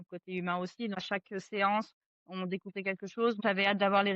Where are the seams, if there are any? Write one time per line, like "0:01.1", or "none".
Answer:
0:01.0
0:03.4